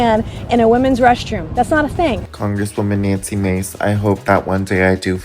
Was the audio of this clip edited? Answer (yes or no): yes